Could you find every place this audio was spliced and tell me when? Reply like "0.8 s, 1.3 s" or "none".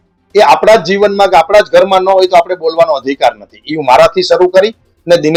none